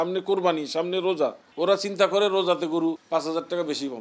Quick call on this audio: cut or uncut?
cut